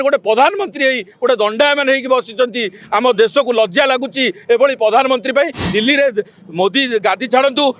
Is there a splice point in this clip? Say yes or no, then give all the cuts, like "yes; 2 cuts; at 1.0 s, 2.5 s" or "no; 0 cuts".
yes; 1 cut; at 5.7 s